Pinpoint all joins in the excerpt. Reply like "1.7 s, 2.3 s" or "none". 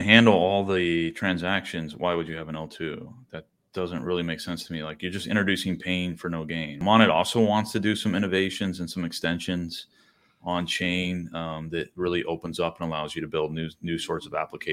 6.8 s